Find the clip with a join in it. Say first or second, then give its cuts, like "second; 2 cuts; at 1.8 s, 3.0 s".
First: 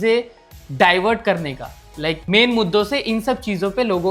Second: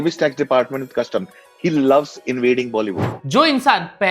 second; 1 cut; at 3.1 s